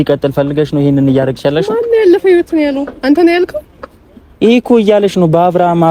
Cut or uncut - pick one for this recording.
uncut